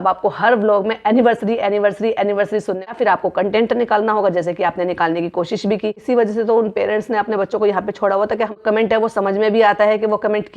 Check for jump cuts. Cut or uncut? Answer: cut